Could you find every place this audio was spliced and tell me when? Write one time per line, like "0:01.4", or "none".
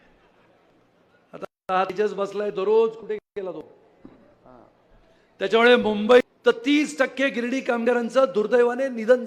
0:06.3